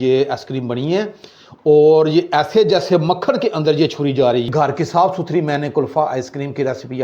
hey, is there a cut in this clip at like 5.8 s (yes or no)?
no